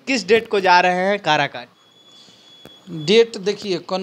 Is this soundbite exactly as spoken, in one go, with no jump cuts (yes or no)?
yes